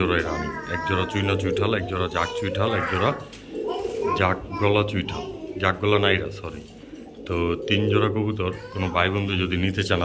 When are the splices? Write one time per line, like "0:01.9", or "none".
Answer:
none